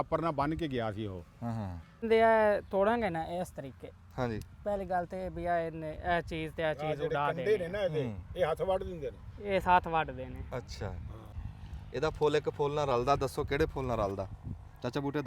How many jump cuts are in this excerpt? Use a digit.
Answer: 2